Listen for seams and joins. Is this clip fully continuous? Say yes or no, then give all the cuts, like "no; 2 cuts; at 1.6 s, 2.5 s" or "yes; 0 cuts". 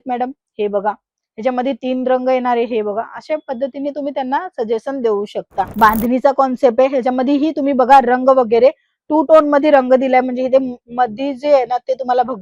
no; 1 cut; at 5.7 s